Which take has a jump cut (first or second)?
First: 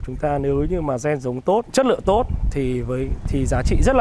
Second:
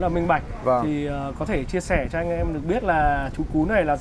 first